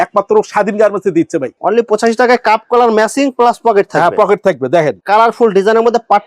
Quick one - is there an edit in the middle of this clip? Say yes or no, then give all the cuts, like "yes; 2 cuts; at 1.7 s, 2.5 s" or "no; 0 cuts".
yes; 2 cuts; at 1.5 s, 5.0 s